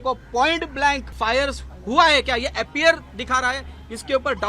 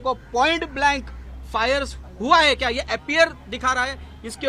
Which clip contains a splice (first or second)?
first